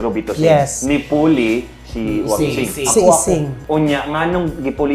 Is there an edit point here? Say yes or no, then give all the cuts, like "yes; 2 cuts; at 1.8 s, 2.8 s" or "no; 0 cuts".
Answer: yes; 1 cut; at 3.6 s